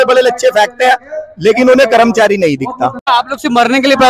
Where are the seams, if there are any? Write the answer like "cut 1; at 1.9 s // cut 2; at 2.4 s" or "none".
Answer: cut 1; at 3.1 s